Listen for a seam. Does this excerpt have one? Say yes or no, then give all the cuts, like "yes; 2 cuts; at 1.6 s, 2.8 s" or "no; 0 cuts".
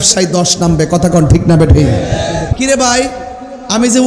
yes; 1 cut; at 2.5 s